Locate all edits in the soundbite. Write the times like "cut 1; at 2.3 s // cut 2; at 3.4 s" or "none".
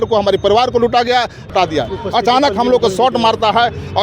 cut 1; at 1.5 s